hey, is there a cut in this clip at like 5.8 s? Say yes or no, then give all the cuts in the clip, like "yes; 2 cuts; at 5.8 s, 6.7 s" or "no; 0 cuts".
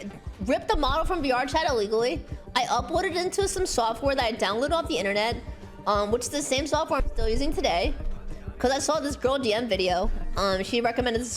no; 0 cuts